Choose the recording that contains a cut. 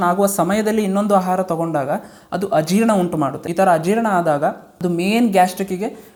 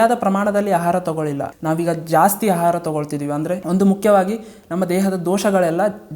second; 1 cut; at 1.5 s

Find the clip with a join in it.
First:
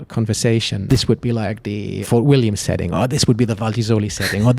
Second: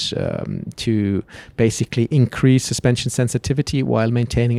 first; 2 cuts; at 0.9 s, 2.0 s

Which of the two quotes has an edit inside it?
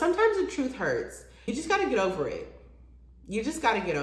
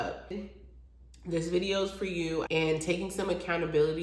second; 1 cut; at 2.5 s

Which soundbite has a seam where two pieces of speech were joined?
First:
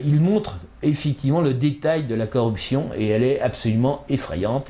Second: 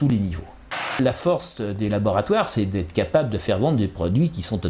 second; 1 cut; at 1.0 s

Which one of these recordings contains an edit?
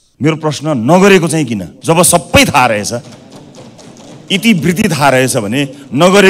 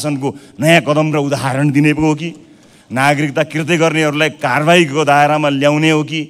first; 1 cut; at 1.7 s

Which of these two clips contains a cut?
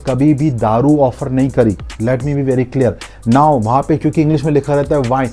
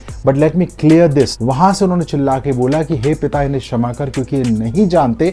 second; 1 cut; at 1.4 s

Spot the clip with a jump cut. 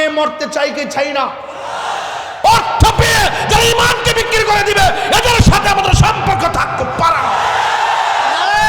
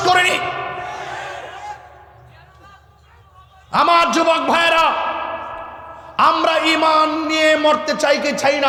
first; 1 cut; at 2.4 s

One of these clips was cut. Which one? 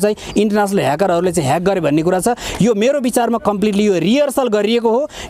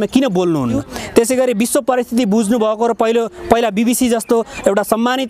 second; 1 cut; at 0.9 s

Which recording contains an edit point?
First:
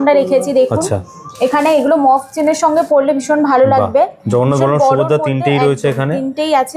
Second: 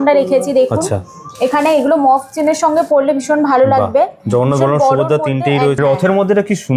second; 1 cut; at 5.8 s

